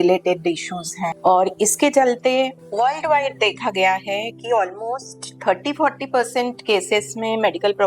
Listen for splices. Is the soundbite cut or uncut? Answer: cut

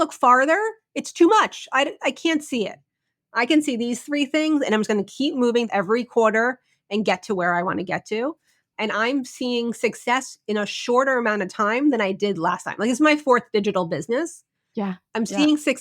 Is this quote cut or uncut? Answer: cut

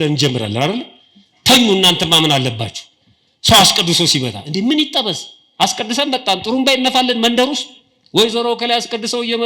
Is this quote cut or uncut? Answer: uncut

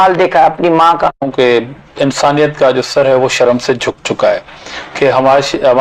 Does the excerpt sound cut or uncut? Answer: cut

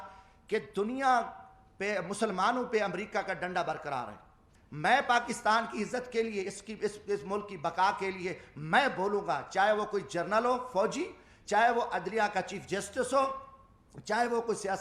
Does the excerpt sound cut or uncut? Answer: cut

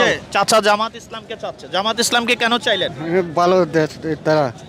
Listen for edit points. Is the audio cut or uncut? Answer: uncut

